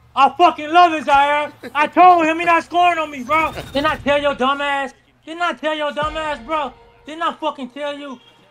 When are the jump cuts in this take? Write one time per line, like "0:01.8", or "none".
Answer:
0:03.6